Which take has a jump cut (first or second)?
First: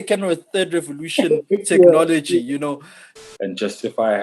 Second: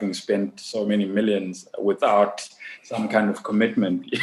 first